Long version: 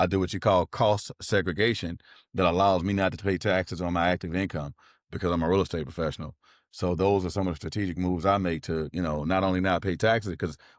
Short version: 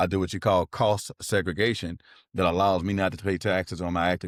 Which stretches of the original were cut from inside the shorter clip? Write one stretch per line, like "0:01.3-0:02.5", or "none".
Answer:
none